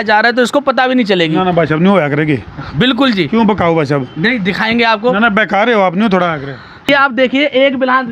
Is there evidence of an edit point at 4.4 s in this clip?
no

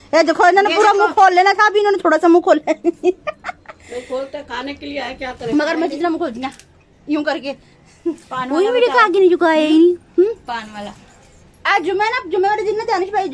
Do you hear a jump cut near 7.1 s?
no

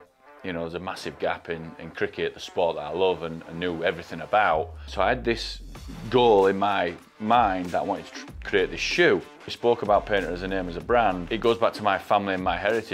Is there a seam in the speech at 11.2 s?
yes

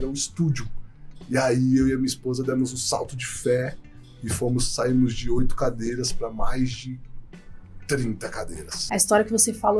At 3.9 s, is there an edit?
no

